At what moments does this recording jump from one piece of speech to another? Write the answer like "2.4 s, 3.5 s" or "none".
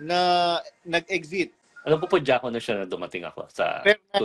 1.7 s